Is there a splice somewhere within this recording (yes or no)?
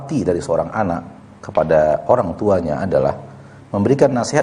no